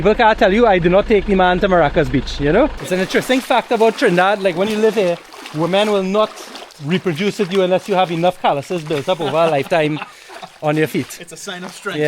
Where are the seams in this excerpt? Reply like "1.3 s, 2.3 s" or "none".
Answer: 2.8 s